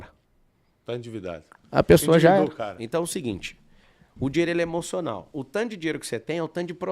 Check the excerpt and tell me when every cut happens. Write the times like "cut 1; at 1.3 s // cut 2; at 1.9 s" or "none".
cut 1; at 2.7 s